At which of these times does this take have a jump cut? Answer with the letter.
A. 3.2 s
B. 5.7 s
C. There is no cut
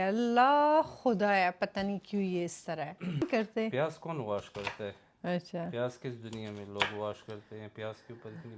A